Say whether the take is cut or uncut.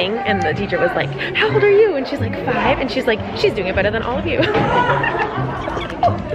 uncut